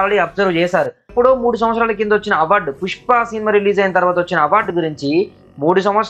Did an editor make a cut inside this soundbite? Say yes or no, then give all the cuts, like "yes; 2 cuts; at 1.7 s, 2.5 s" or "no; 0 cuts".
yes; 1 cut; at 1.1 s